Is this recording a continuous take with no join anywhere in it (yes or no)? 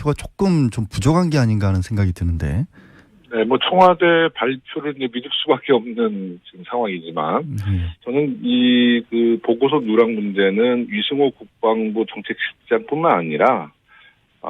no